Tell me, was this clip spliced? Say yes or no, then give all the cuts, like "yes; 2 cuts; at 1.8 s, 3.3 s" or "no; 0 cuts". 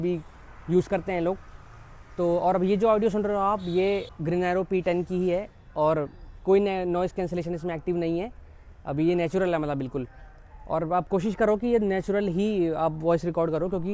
no; 0 cuts